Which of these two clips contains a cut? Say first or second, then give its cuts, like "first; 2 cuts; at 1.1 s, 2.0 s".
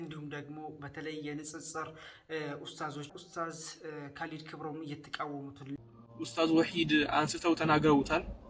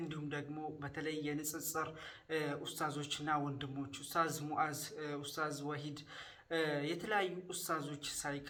first; 2 cuts; at 3.1 s, 5.8 s